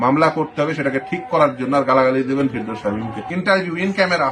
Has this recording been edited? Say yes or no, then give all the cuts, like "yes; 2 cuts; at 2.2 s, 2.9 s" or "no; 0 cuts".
yes; 1 cut; at 3.1 s